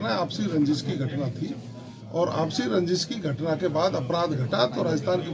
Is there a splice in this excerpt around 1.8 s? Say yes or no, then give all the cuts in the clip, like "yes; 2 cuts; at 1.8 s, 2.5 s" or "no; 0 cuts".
no; 0 cuts